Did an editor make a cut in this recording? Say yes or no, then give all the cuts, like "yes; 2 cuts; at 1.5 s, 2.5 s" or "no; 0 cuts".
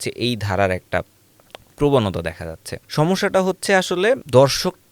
no; 0 cuts